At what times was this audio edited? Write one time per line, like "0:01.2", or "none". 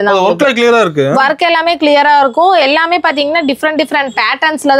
none